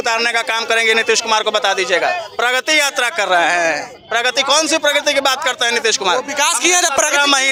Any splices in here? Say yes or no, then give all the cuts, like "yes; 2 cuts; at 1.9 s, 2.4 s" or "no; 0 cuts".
no; 0 cuts